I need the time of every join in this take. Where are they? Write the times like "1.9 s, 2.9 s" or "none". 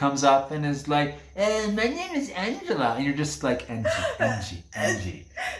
none